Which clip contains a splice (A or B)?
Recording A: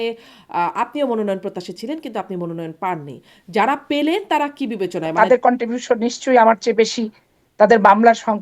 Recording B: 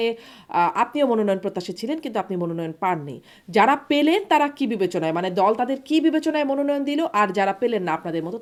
A